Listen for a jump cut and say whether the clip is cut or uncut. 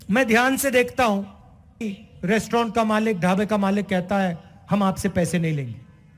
cut